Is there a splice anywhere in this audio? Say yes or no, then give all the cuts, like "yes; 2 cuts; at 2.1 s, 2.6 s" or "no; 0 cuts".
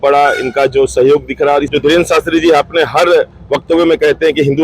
no; 0 cuts